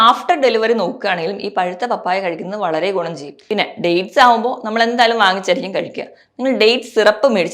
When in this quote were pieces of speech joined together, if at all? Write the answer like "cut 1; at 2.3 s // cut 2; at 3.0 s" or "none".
cut 1; at 3.3 s